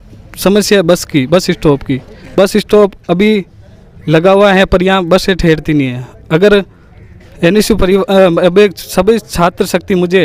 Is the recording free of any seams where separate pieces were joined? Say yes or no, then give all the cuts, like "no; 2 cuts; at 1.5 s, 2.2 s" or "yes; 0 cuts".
yes; 0 cuts